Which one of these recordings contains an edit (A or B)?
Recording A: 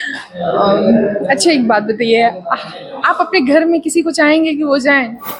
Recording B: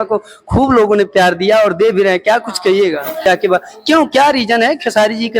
B